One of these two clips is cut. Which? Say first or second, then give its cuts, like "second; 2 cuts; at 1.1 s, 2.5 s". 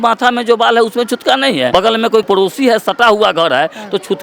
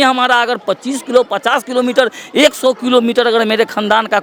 first; 1 cut; at 2.2 s